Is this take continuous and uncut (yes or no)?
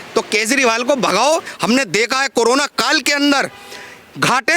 no